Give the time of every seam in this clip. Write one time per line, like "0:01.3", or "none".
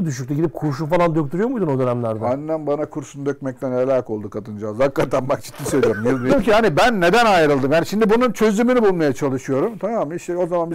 0:06.3